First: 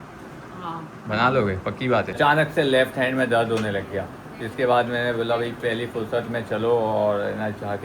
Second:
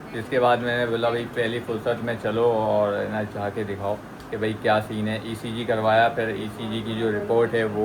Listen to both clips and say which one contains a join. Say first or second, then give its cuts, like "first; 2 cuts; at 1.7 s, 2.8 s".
first; 1 cut; at 2.2 s